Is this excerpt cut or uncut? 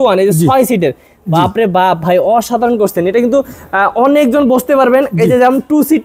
uncut